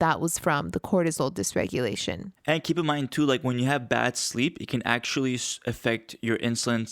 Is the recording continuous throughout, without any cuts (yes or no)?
no